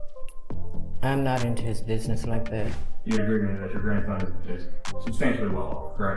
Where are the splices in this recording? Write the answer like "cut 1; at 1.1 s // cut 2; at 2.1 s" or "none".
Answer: cut 1; at 2.7 s

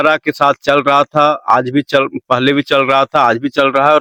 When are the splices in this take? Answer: none

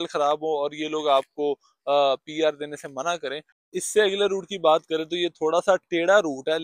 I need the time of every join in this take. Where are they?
cut 1; at 3.5 s

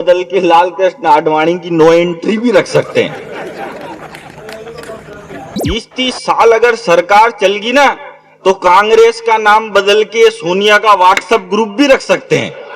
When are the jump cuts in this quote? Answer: cut 1; at 5.6 s

